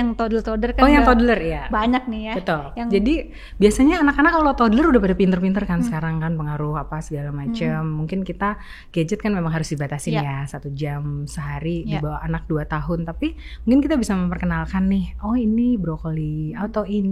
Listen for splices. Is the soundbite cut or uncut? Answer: uncut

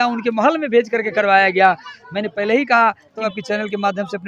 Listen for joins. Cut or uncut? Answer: cut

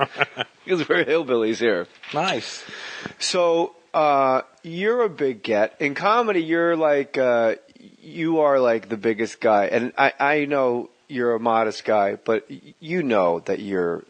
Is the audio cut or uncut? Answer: cut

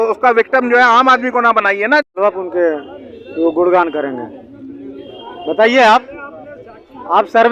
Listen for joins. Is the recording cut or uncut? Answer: cut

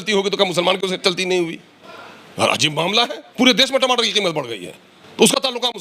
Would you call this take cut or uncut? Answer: cut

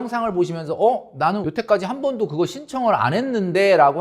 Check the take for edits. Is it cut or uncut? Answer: cut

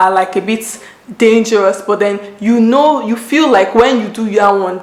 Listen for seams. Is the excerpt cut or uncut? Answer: uncut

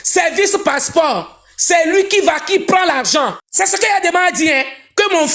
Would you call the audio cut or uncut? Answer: cut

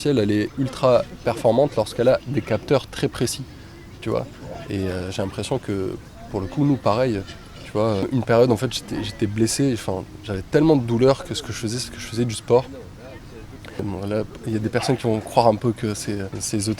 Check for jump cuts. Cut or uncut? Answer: uncut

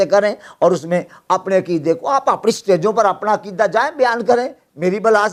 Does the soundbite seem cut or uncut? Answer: uncut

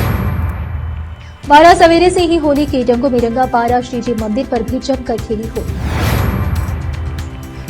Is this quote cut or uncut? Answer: cut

